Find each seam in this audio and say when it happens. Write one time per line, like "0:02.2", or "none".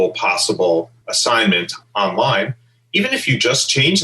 0:01.4

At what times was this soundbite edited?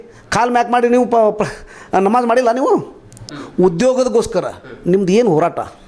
0:03.4

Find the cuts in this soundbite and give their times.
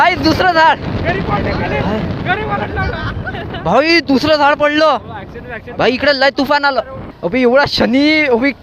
0:07.1

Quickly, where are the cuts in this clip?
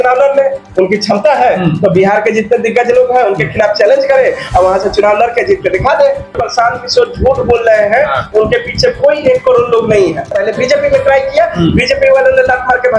0:06.3
0:10.3

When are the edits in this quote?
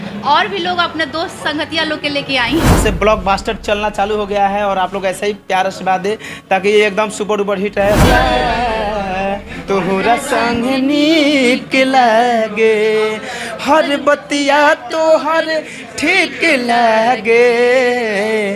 0:02.8
0:08.0

